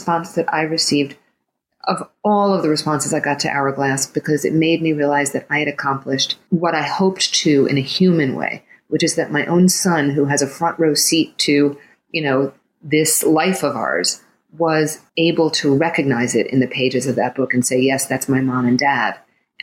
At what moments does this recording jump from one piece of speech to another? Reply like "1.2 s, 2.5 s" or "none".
6.3 s, 15.0 s